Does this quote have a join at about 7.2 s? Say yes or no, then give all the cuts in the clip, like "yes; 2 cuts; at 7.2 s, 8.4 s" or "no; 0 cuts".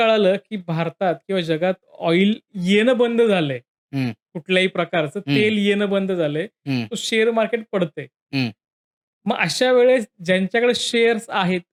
no; 0 cuts